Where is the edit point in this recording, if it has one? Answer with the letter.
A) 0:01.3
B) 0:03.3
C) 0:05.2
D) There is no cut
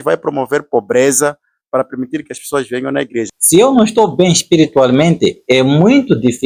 B